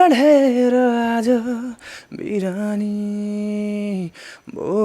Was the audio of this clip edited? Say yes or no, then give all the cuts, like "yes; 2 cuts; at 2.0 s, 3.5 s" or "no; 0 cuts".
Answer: no; 0 cuts